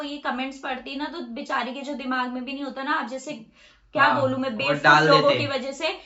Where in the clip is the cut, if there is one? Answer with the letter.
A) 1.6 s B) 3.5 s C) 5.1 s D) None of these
D